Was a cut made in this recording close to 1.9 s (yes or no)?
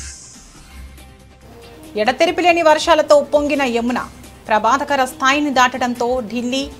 yes